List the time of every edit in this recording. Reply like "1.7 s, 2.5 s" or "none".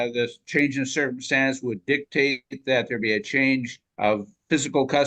3.8 s